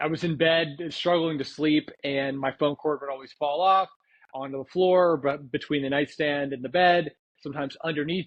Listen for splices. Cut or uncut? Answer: uncut